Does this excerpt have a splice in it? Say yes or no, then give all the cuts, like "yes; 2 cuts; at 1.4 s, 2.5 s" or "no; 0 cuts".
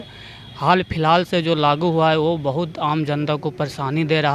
no; 0 cuts